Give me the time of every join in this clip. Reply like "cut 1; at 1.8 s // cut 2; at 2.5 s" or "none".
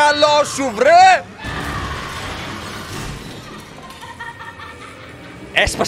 none